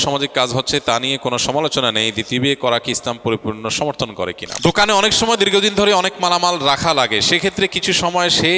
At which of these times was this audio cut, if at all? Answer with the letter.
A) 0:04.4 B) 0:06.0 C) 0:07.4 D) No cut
A